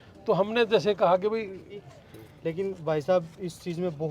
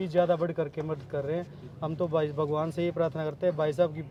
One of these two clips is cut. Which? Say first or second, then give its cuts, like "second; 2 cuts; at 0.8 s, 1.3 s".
first; 1 cut; at 1.7 s